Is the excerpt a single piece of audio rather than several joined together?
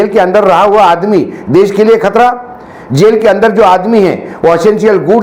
yes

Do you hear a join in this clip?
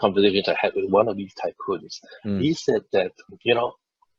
no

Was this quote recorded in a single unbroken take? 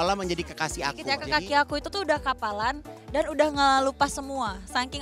no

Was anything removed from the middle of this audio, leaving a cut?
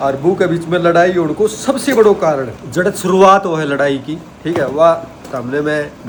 no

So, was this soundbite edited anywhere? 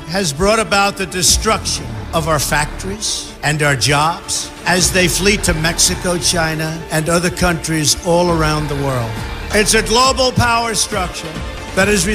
yes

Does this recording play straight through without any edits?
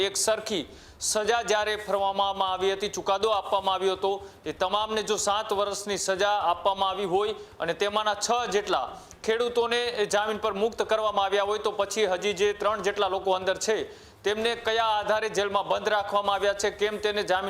yes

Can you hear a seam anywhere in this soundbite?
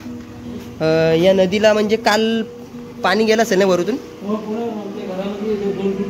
no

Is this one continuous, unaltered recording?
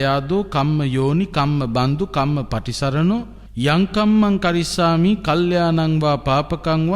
no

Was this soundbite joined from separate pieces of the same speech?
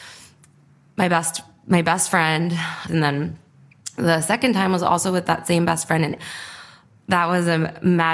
yes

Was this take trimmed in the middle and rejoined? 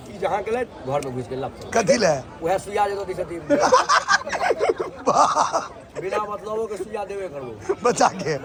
no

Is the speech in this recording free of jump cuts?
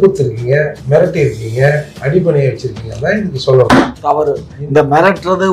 no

